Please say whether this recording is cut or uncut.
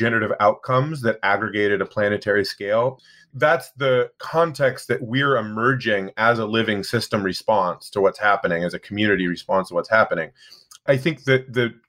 cut